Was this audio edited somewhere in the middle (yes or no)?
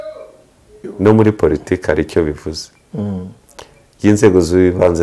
yes